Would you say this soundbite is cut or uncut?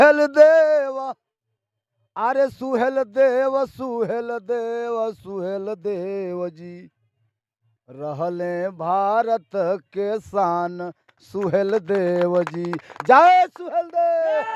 uncut